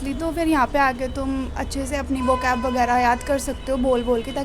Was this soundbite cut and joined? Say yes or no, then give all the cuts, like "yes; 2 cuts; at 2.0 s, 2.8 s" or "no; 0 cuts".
no; 0 cuts